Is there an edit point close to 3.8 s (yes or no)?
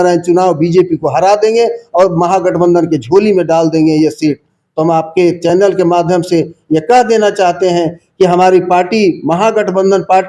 no